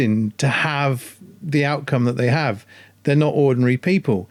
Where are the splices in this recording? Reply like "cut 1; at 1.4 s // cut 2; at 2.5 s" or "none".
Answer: none